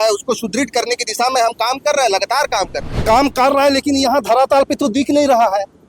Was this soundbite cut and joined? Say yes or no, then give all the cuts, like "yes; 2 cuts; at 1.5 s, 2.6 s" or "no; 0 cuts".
yes; 1 cut; at 3.0 s